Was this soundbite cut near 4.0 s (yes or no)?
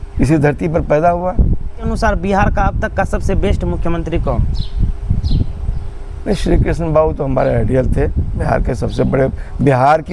no